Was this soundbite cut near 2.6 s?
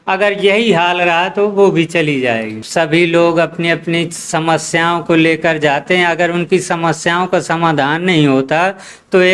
yes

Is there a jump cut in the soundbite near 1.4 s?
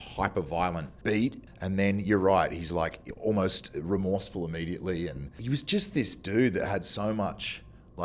yes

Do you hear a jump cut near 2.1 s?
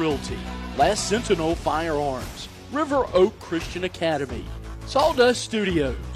no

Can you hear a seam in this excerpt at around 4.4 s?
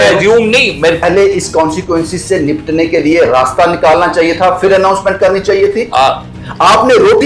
no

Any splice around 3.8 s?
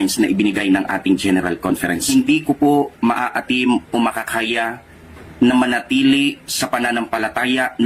no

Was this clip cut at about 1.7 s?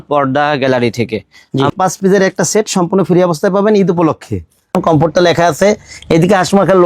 yes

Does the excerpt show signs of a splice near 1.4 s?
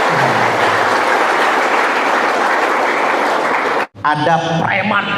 no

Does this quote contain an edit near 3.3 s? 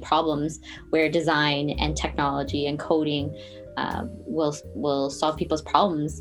no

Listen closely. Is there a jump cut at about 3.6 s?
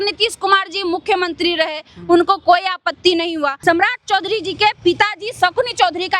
yes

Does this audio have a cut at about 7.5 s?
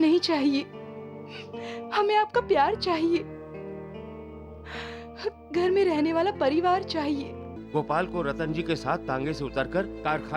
yes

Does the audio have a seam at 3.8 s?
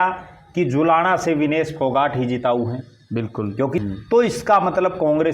yes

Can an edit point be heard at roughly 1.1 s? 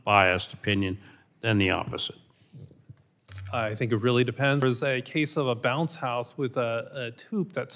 no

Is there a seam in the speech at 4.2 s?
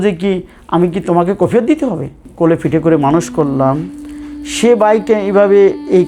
no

